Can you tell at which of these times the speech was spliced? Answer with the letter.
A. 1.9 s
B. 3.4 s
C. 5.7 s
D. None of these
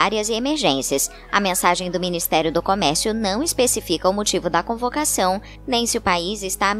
A